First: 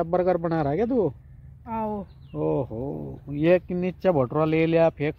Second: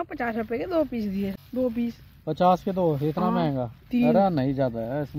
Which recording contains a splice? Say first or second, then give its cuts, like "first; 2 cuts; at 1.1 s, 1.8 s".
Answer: second; 1 cut; at 1.4 s